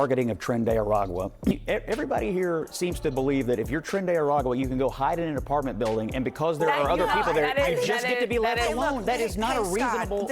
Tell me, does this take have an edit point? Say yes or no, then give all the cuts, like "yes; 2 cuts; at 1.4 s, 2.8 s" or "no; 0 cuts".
yes; 1 cut; at 1.5 s